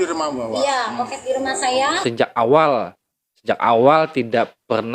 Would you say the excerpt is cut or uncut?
cut